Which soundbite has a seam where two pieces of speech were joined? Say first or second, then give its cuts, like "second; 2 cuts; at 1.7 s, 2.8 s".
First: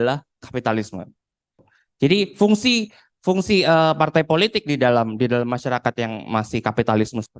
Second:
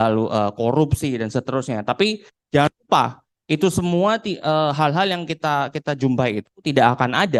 first; 1 cut; at 1.6 s